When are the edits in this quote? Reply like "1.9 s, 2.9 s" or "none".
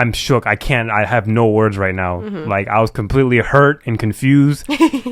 none